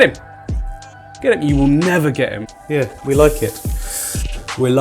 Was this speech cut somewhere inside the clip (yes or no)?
yes